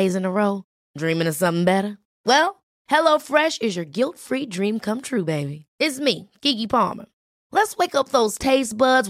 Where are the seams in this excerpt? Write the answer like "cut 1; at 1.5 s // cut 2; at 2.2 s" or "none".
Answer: none